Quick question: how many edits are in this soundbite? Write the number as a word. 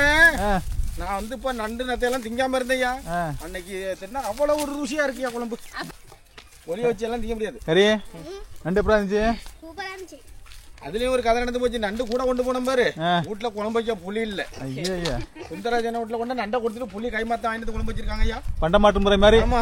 one